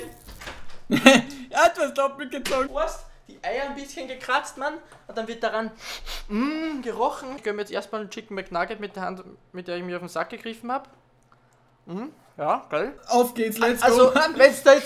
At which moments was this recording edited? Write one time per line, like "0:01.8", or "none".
0:02.7
0:07.4
0:13.0

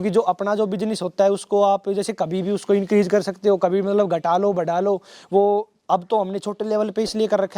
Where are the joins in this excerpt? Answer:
none

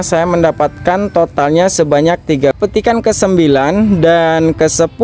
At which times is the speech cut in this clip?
0:02.6

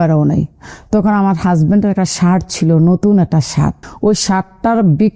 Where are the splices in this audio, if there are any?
0:03.8

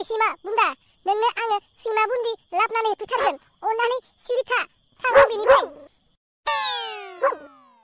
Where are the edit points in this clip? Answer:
none

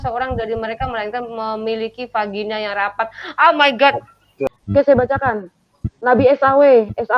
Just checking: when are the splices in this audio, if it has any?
0:04.6

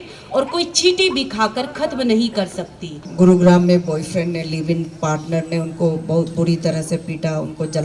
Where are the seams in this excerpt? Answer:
0:03.0

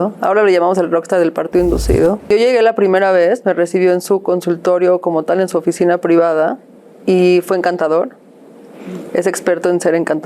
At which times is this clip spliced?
0:02.3

